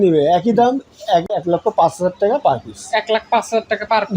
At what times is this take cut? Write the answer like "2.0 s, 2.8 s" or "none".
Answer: 1.3 s